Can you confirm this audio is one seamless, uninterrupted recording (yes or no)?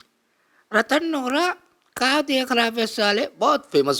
yes